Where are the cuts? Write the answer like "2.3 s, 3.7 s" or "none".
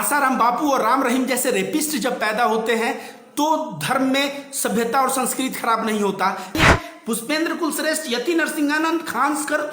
6.6 s

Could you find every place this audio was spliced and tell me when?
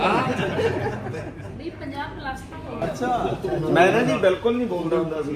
2.8 s

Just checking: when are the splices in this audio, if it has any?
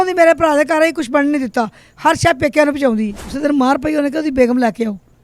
3.3 s

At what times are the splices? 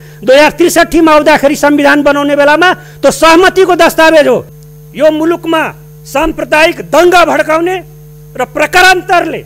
4.6 s

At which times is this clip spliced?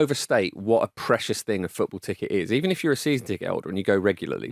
none

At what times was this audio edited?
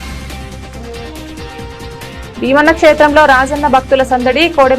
1.4 s

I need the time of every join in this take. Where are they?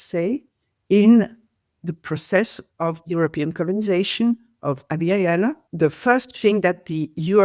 5.6 s

